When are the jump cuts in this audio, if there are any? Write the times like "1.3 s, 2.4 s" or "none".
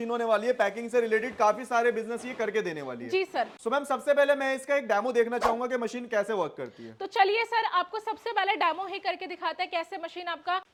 none